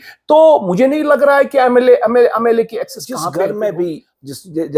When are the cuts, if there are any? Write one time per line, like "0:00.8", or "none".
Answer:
0:03.2